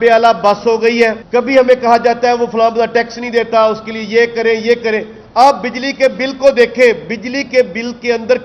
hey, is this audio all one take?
no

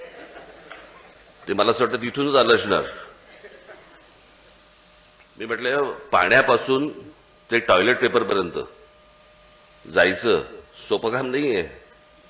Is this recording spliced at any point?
yes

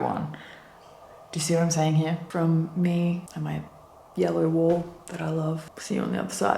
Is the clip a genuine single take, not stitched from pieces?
no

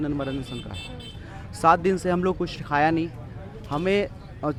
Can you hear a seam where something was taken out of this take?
no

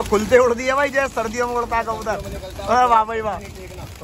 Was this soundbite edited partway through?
no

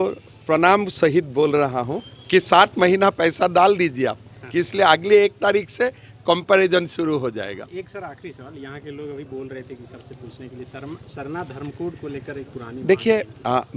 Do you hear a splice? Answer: no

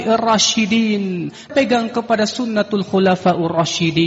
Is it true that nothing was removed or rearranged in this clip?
no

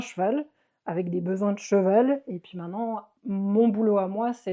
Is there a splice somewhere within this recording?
yes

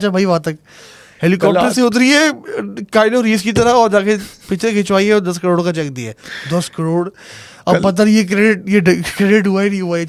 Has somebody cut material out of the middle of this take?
no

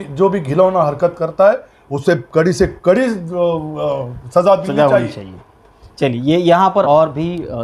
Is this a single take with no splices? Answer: yes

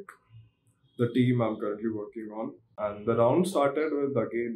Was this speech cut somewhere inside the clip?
yes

